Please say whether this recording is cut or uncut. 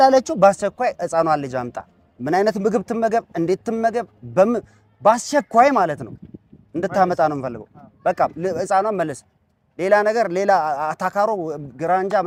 uncut